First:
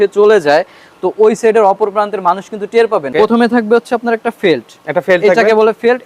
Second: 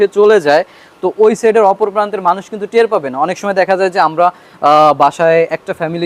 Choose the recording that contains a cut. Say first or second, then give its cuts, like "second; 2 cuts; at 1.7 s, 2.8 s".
first; 1 cut; at 3.1 s